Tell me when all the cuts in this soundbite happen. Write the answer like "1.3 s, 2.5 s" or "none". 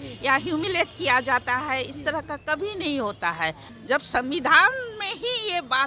3.7 s